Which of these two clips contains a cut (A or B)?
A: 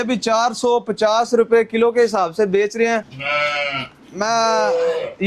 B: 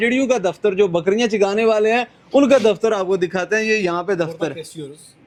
A